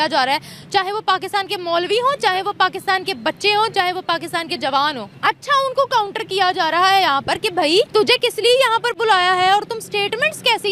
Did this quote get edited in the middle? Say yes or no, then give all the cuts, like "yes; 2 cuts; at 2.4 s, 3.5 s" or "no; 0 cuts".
yes; 2 cuts; at 5.1 s, 7.7 s